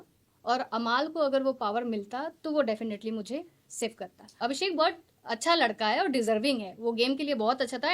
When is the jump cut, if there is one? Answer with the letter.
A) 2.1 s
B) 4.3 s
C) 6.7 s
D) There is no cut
B